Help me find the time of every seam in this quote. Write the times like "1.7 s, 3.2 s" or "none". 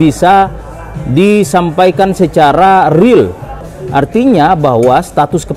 3.5 s